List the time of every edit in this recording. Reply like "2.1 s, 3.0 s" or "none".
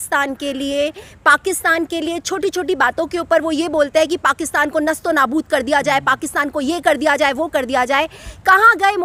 none